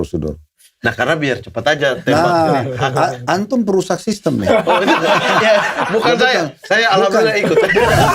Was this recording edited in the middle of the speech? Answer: no; 0 cuts

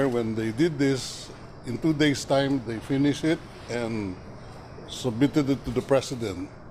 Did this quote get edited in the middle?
yes; 1 cut; at 1.1 s

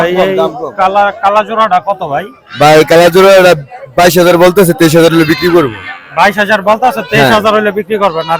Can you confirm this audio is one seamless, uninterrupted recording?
yes; 0 cuts

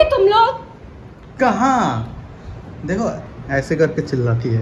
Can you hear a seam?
no; 0 cuts

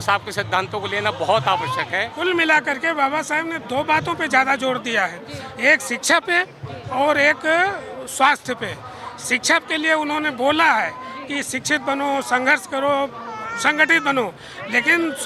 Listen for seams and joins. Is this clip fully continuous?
no; 1 cut; at 2.1 s

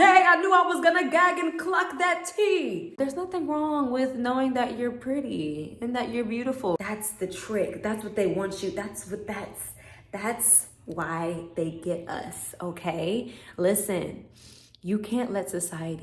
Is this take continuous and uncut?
no; 2 cuts; at 2.9 s, 6.8 s

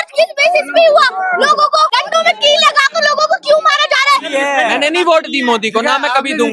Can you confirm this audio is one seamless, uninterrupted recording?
no; 2 cuts; at 1.9 s, 4.3 s

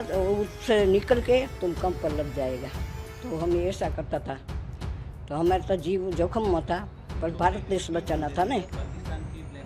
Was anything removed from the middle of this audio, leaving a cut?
no; 0 cuts

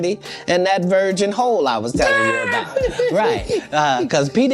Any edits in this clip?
no; 0 cuts

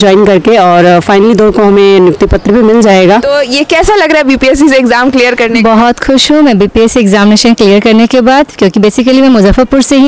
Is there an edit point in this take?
yes; 1 cut; at 3.3 s

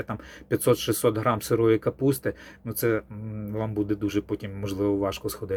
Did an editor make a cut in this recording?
no; 0 cuts

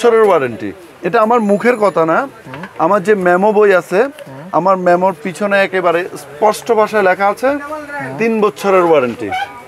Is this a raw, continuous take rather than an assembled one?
yes; 0 cuts

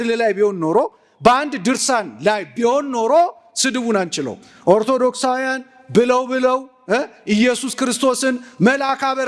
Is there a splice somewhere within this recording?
no; 0 cuts

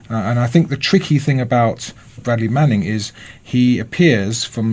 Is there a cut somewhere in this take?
yes; 1 cut; at 3.5 s

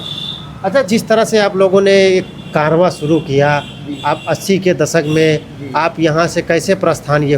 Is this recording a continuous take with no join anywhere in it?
yes; 0 cuts

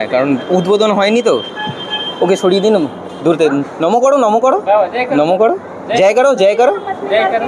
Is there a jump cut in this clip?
no; 0 cuts

